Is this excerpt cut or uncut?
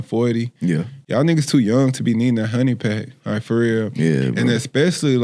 cut